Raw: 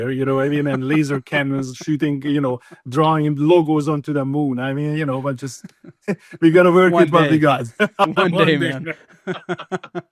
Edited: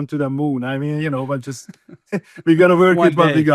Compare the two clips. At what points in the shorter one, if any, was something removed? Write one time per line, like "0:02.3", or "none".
none